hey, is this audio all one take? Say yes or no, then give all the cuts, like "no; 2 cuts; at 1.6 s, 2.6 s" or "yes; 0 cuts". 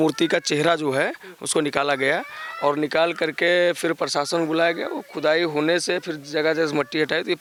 yes; 0 cuts